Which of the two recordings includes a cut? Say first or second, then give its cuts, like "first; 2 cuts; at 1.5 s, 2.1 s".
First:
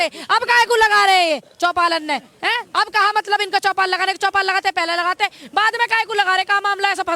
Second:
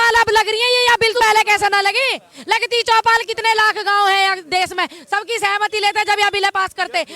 second; 1 cut; at 1.2 s